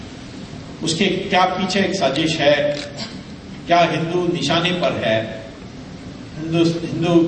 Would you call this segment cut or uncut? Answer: cut